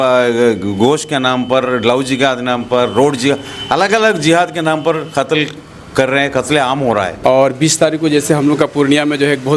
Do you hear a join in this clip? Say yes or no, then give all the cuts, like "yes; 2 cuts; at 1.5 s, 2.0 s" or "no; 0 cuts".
yes; 1 cut; at 7.1 s